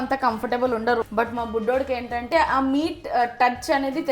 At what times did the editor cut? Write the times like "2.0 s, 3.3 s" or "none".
1.0 s, 2.3 s